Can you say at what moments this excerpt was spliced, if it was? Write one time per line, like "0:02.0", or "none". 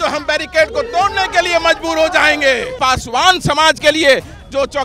0:02.8